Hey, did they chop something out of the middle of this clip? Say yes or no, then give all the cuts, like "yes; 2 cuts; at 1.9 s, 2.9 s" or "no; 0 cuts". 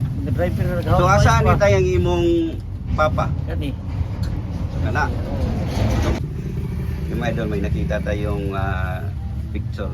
yes; 1 cut; at 6.2 s